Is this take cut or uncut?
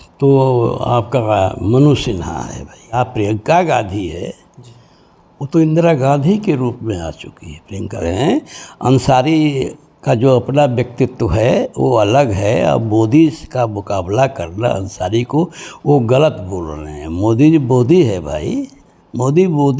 cut